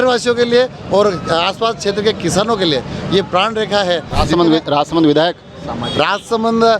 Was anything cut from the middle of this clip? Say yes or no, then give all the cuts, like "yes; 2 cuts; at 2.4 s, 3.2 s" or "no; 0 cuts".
yes; 1 cut; at 4.1 s